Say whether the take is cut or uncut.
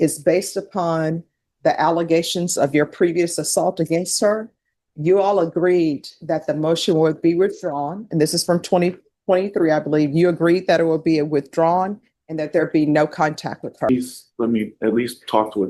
cut